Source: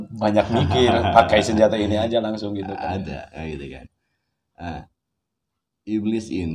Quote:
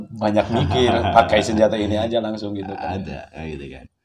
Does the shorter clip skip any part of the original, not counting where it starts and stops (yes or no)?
no